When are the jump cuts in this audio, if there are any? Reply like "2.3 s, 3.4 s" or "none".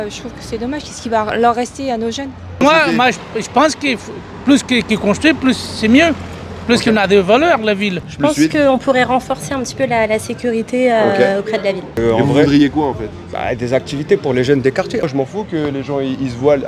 2.6 s, 8.0 s, 11.9 s, 15.0 s